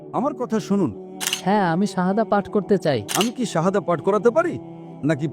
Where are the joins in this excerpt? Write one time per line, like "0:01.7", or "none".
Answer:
0:01.1
0:03.1